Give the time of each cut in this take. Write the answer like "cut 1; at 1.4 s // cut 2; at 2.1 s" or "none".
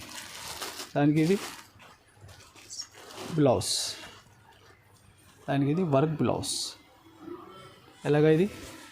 cut 1; at 5.3 s